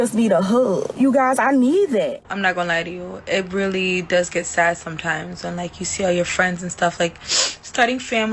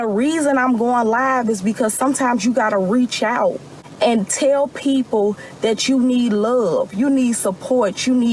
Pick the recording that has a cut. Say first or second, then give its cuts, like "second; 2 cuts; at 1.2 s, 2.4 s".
first; 2 cuts; at 1.0 s, 2.3 s